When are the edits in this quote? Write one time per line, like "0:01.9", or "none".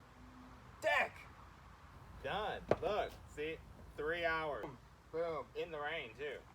0:04.8